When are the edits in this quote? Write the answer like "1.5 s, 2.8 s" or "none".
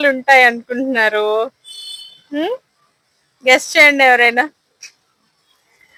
none

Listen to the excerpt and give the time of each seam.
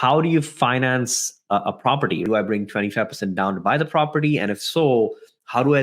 2.2 s

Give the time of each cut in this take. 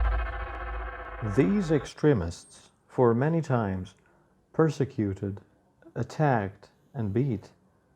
1.2 s

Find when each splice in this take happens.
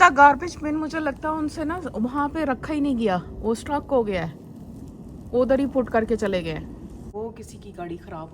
7.1 s

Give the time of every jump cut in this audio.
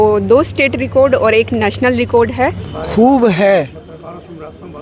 2.7 s

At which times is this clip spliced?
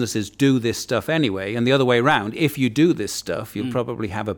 none

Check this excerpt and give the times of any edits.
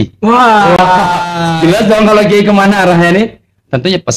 none

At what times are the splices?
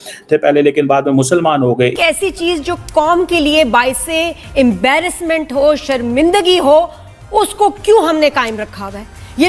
1.9 s

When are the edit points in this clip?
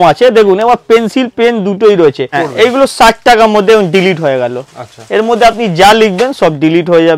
2.3 s

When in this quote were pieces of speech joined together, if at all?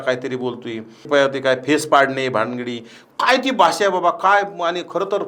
1.0 s

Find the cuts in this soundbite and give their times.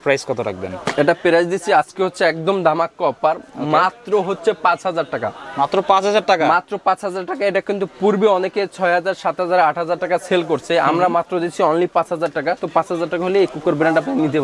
none

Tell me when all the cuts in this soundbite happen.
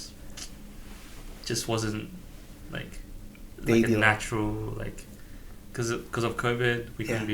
1.2 s

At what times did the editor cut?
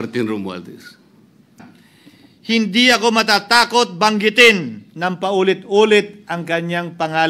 1.6 s

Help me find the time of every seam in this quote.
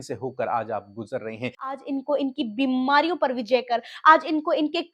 1.7 s

